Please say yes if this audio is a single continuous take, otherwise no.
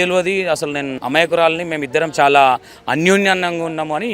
no